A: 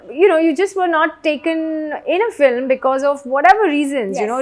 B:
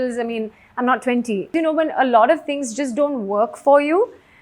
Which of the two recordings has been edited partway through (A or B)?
B